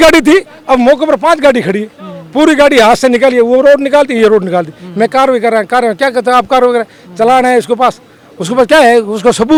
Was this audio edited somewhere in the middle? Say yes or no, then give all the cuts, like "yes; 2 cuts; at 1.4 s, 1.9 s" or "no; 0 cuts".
no; 0 cuts